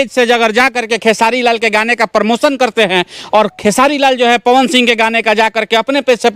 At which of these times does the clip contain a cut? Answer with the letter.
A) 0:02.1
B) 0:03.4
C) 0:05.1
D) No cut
D